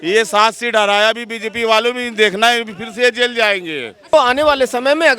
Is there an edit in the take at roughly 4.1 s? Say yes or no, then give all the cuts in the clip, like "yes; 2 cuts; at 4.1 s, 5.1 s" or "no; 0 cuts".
yes; 1 cut; at 4.1 s